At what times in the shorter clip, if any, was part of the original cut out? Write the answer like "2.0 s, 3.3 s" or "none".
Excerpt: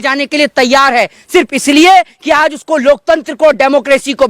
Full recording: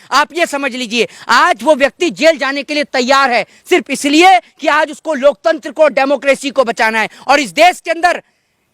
none